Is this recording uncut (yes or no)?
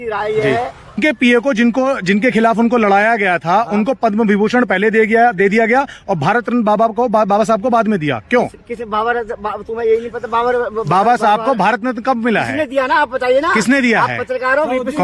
no